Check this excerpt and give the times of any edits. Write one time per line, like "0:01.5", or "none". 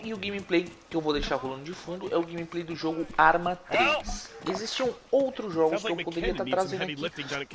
0:04.5